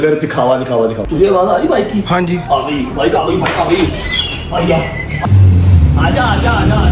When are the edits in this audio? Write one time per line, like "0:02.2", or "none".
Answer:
0:01.1
0:05.2